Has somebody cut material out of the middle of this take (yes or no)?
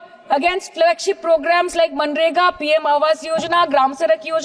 no